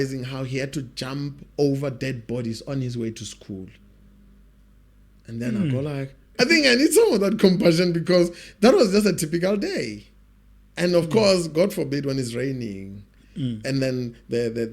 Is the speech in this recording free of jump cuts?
no; 1 cut; at 6.3 s

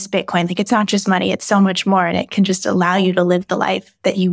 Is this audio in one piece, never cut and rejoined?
yes; 0 cuts

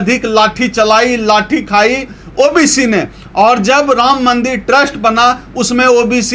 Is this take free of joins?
yes; 0 cuts

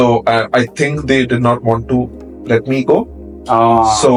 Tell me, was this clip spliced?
no; 0 cuts

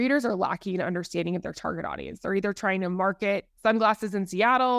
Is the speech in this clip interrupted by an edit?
no; 0 cuts

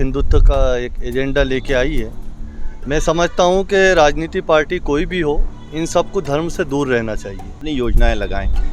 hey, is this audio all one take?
no; 1 cut; at 7.6 s

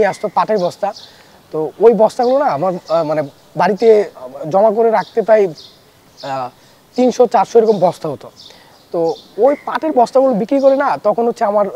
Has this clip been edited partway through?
no; 0 cuts

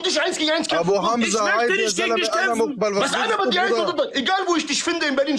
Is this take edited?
no; 0 cuts

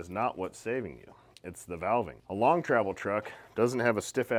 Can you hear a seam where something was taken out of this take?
no; 0 cuts

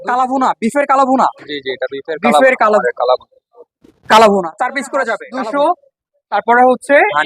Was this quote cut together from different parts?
yes; 2 cuts; at 2.8 s, 5.2 s

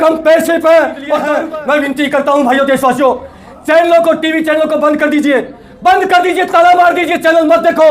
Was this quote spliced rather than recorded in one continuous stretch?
yes; 1 cut; at 1.3 s

